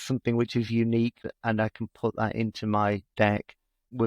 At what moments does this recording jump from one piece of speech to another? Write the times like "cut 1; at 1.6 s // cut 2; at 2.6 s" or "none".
cut 1; at 1.2 s // cut 2; at 3.3 s